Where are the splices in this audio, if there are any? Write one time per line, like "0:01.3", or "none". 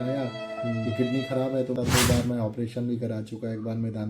0:01.8